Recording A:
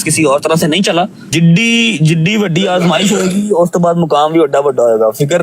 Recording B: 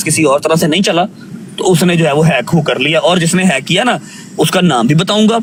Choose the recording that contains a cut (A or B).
A